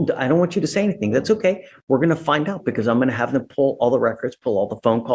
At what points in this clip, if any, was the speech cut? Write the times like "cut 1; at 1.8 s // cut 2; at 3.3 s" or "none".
none